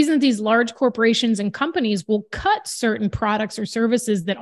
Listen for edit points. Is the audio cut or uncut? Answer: uncut